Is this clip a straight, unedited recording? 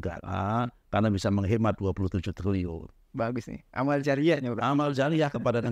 yes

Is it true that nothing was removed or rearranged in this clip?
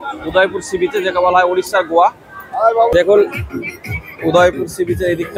no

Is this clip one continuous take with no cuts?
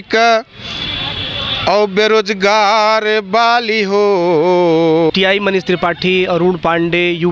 no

